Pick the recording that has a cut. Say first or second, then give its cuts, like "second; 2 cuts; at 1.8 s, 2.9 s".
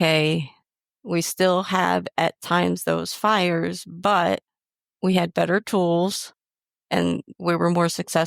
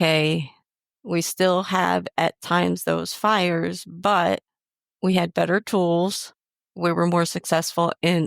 second; 1 cut; at 6.7 s